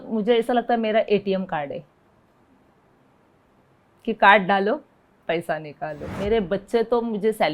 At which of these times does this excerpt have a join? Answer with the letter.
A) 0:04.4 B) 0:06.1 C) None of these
B